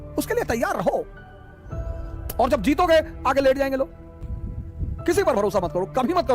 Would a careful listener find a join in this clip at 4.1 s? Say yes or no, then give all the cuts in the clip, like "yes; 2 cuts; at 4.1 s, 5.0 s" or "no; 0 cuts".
yes; 1 cut; at 4.1 s